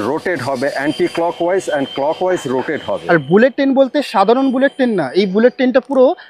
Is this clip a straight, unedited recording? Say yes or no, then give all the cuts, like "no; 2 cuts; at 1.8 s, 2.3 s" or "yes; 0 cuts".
no; 1 cut; at 2.9 s